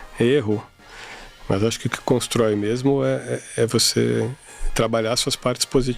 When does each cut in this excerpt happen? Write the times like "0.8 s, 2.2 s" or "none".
none